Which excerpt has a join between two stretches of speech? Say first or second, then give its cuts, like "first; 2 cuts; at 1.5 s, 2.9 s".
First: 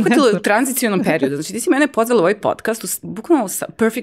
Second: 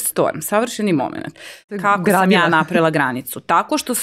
second; 1 cut; at 1.8 s